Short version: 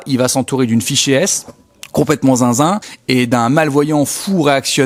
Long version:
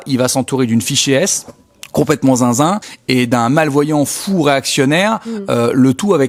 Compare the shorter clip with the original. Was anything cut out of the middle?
no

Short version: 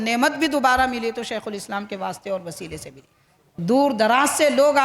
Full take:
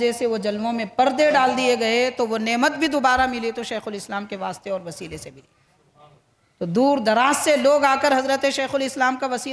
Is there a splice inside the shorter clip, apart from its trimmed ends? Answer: yes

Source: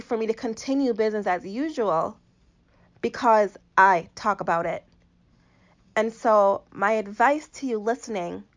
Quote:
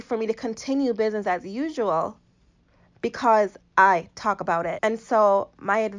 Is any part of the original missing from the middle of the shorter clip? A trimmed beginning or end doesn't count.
yes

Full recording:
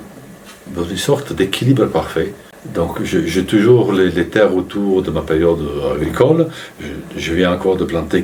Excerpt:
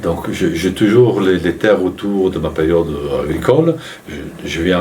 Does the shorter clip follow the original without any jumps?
yes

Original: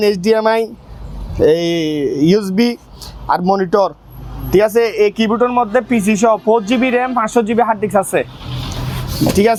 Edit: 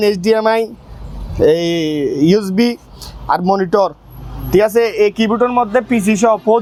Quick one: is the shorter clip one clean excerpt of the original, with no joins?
yes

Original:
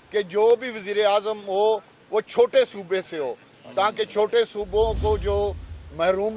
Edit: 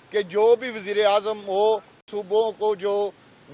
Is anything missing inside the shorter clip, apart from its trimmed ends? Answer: yes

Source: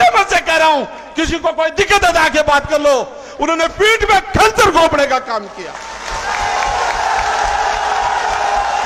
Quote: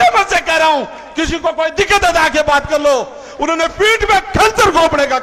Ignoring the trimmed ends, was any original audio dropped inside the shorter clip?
no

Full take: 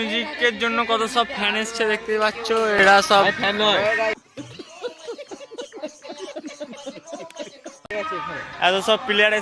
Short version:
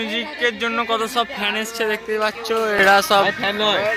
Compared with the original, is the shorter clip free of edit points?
yes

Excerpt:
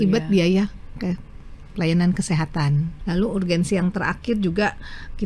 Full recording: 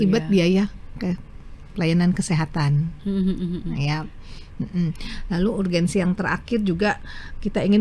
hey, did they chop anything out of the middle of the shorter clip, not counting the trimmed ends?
yes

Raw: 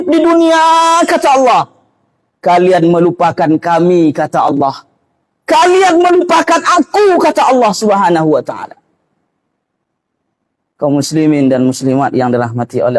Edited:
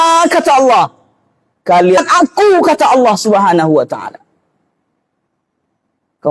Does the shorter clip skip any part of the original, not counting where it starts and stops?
yes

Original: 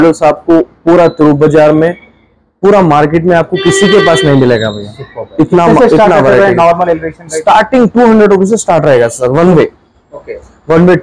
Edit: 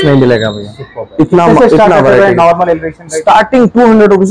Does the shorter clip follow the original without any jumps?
yes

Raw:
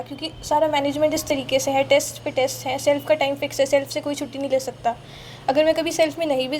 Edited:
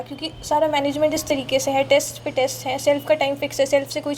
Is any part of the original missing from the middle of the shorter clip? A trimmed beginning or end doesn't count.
no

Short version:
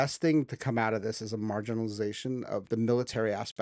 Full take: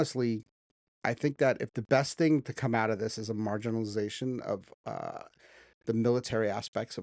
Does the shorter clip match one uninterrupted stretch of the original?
no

